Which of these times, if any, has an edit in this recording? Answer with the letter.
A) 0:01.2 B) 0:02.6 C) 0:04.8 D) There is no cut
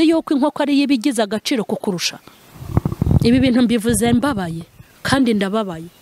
B